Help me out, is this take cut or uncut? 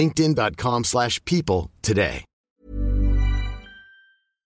uncut